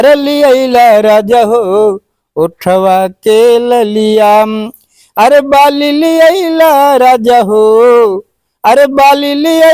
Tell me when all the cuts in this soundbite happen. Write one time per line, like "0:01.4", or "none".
none